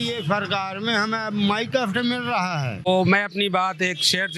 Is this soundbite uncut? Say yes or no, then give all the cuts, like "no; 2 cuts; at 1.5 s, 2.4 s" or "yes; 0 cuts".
no; 1 cut; at 2.9 s